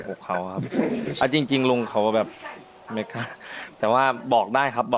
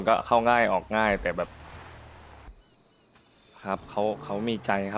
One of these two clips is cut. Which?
second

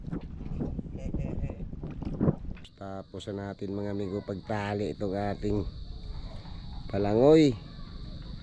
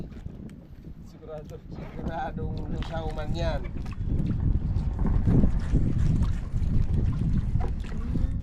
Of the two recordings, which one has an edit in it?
first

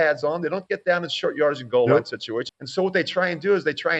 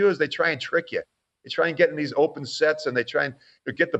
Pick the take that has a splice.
first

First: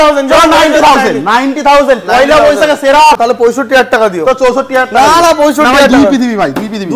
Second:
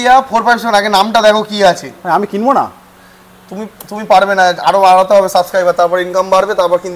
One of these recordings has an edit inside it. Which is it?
first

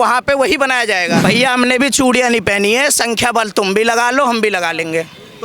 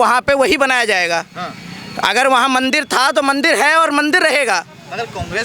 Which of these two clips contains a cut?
first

